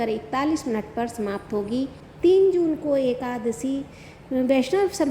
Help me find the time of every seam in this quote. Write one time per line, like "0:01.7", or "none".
0:02.0